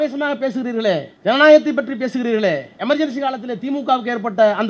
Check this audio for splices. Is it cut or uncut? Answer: cut